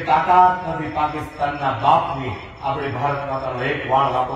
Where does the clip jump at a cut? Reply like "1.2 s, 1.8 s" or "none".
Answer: none